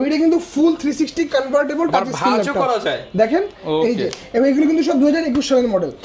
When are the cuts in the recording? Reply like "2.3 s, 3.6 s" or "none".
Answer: none